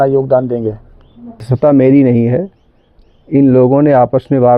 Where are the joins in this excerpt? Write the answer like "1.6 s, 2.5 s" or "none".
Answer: 1.5 s

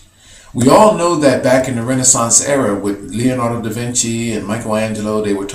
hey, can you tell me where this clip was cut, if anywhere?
2.5 s

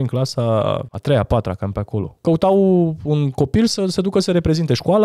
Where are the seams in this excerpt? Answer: 0.9 s, 2.1 s

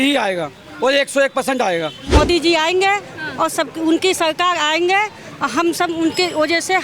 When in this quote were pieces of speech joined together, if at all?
2.1 s

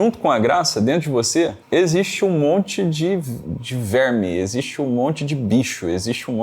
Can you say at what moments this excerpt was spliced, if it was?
1.6 s

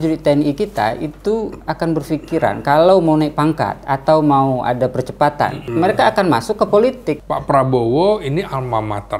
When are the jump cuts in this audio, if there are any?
5.6 s, 7.2 s

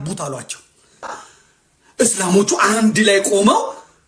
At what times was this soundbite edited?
1.2 s

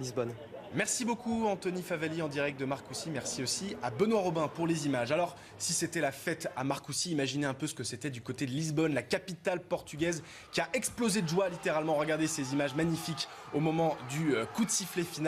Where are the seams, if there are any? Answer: 7.7 s

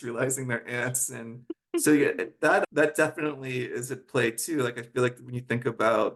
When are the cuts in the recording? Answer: none

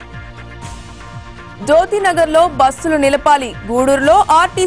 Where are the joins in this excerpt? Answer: 1.3 s

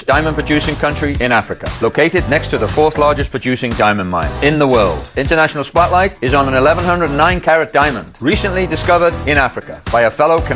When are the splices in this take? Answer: none

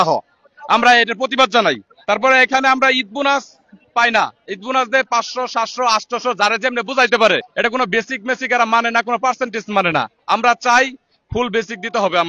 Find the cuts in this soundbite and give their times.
1.9 s, 7.5 s

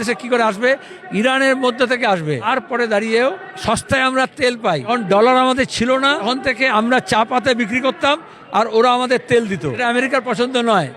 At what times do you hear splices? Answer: 2.5 s, 3.5 s, 4.9 s, 6.3 s, 9.8 s

